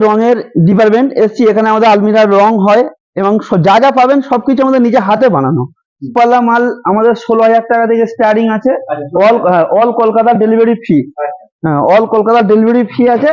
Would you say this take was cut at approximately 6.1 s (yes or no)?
yes